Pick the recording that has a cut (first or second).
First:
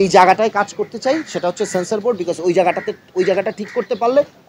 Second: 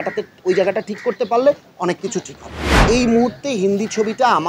second